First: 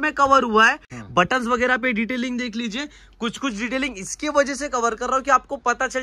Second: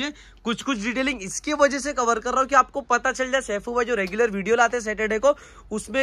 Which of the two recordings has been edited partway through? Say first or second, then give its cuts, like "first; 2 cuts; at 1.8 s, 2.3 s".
first; 1 cut; at 1.0 s